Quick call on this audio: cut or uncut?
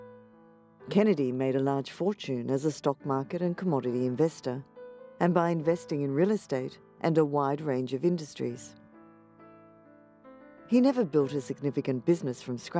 uncut